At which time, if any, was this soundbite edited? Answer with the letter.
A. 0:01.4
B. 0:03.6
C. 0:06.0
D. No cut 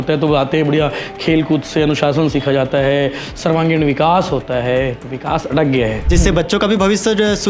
C